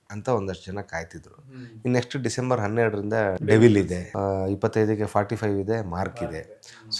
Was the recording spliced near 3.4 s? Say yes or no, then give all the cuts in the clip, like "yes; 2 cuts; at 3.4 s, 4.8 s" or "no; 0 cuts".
yes; 2 cuts; at 3.4 s, 4.0 s